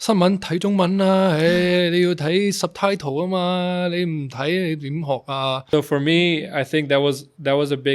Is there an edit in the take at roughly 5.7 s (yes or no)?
yes